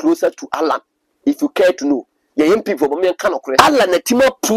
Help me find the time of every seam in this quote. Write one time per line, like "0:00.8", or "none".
0:03.5